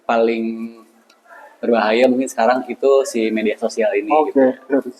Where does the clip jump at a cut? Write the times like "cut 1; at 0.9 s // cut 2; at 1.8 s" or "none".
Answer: none